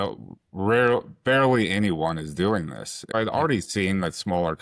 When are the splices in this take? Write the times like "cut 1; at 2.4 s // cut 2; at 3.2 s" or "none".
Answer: cut 1; at 3.1 s